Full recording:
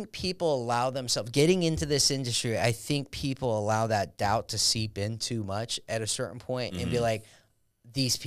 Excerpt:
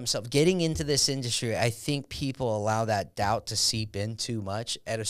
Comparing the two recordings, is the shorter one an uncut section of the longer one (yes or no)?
yes